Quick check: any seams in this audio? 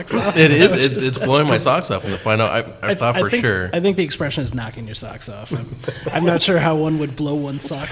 no; 0 cuts

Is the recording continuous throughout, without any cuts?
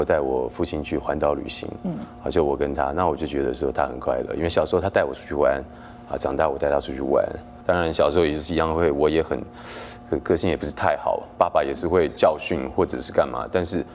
no; 1 cut; at 7.5 s

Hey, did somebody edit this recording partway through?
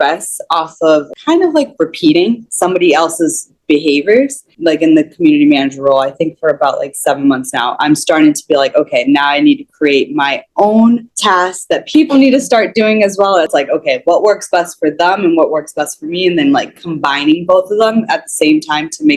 yes; 4 cuts; at 1.1 s, 4.5 s, 11.4 s, 13.5 s

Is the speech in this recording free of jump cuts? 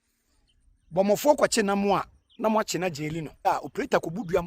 no; 1 cut; at 3.5 s

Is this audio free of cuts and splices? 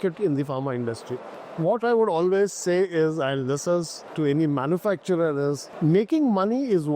no; 3 cuts; at 1.4 s, 4.0 s, 5.7 s

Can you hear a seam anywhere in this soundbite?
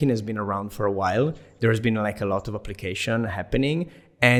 no; 0 cuts

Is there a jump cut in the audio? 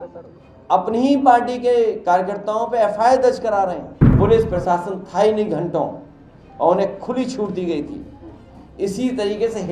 yes; 1 cut; at 4.1 s

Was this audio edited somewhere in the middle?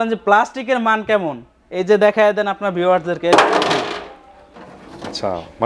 no; 0 cuts

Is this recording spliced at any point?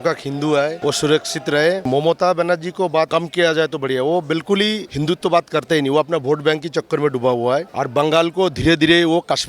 yes; 5 cuts; at 0.8 s, 1.9 s, 3.1 s, 4.9 s, 7.7 s

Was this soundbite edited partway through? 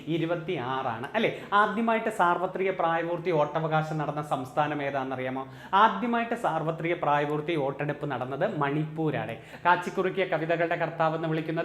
yes; 1 cut; at 9.4 s

